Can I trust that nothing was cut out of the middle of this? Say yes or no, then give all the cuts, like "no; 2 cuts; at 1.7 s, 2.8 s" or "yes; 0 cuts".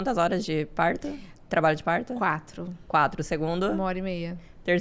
yes; 0 cuts